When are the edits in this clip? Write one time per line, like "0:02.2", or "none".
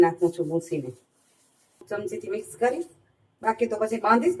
0:01.8